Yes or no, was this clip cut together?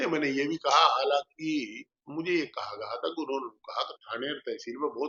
no